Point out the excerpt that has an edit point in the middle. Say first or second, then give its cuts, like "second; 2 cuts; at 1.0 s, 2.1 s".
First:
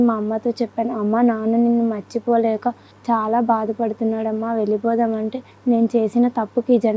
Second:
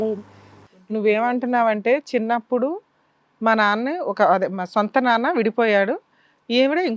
first; 2 cuts; at 2.9 s, 5.5 s